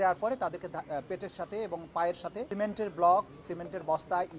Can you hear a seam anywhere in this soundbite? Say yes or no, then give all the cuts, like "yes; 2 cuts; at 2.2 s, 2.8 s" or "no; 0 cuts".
yes; 2 cuts; at 2.5 s, 3.4 s